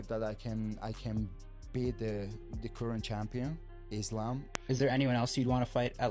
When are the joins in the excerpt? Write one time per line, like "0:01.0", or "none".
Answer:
0:04.5